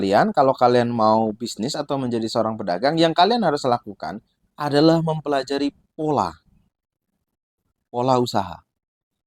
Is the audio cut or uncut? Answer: uncut